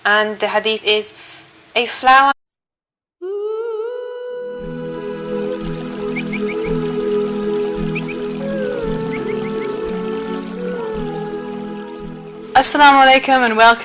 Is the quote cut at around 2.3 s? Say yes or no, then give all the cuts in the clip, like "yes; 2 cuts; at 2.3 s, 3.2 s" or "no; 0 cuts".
no; 0 cuts